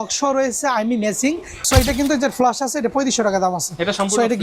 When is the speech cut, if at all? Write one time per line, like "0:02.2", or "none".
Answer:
0:01.6